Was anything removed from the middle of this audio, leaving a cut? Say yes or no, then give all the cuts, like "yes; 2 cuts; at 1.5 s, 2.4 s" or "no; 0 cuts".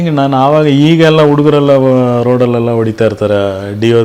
no; 0 cuts